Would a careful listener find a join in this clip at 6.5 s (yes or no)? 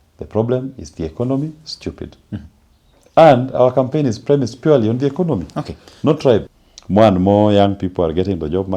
yes